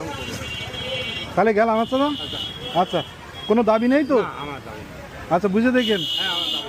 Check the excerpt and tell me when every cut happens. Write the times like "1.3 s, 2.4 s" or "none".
none

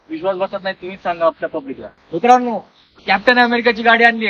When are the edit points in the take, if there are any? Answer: 2.0 s

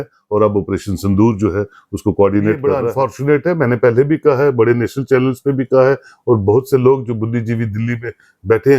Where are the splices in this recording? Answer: 2.8 s

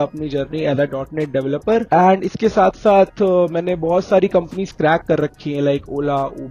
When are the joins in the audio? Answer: none

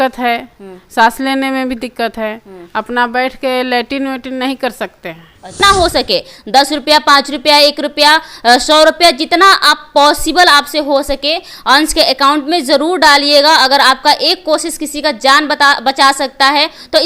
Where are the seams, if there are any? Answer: 5.6 s

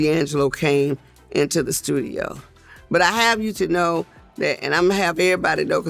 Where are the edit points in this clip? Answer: none

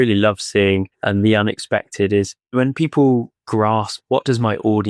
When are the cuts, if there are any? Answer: 0.9 s, 2.4 s, 3.6 s

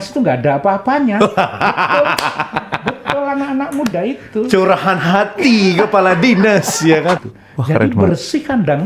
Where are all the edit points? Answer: 7.3 s

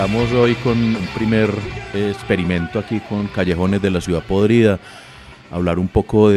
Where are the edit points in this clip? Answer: 1.0 s, 1.8 s

